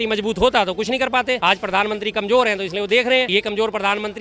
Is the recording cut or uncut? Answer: cut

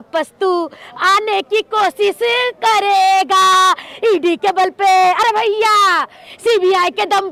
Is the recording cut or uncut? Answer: uncut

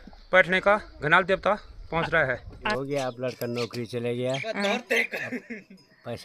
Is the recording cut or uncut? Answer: cut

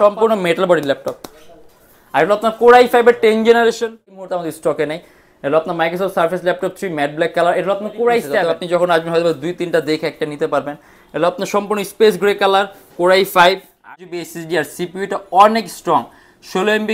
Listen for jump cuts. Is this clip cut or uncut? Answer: cut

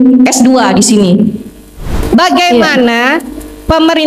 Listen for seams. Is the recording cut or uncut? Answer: cut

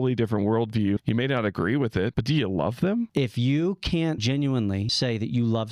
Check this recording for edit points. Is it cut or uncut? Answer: cut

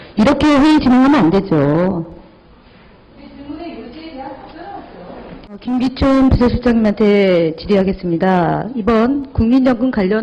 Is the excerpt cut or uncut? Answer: cut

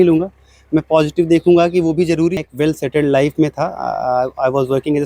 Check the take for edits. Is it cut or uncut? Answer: cut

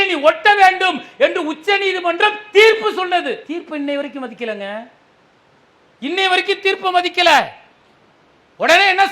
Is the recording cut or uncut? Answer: uncut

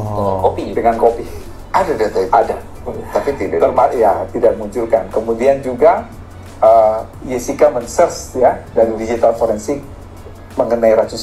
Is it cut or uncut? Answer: uncut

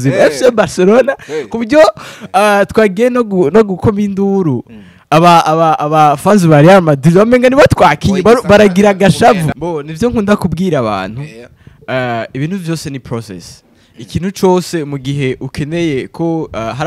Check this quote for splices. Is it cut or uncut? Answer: cut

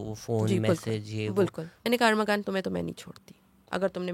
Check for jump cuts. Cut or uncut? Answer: cut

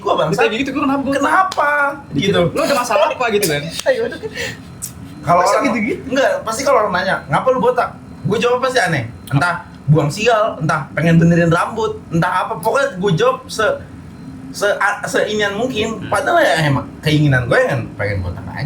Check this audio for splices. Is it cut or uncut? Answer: uncut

